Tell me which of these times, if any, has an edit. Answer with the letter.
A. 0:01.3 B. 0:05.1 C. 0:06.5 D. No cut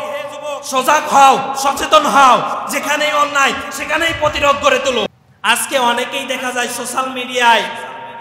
B